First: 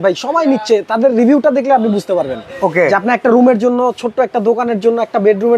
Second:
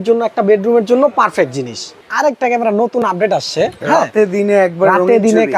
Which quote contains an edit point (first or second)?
second